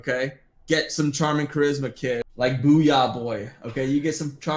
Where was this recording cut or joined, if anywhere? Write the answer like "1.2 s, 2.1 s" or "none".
2.3 s